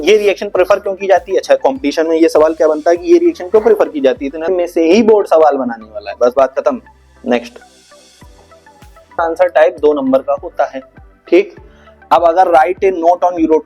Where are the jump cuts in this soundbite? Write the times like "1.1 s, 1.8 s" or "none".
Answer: 4.5 s, 9.2 s